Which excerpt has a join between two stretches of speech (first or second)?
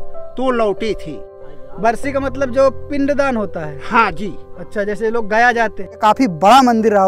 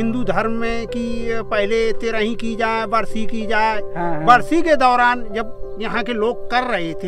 first